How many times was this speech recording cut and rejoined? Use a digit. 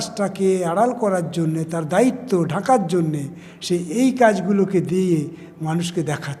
0